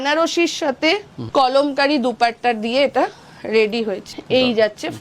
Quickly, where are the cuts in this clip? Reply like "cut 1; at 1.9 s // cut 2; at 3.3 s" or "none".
cut 1; at 1.1 s // cut 2; at 4.1 s